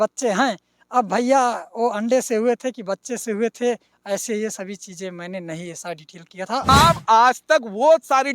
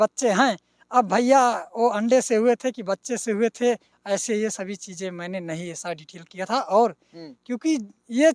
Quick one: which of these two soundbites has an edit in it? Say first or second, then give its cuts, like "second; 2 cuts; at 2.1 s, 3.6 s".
first; 1 cut; at 6.7 s